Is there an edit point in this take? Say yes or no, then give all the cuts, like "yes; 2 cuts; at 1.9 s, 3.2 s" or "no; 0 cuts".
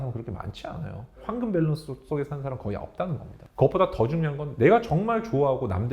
yes; 2 cuts; at 1.3 s, 3.4 s